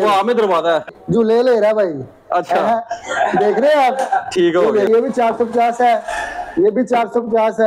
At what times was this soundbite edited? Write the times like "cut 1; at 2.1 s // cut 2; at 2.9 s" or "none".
cut 1; at 0.9 s // cut 2; at 4.9 s